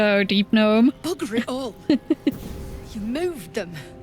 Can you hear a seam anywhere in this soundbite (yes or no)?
no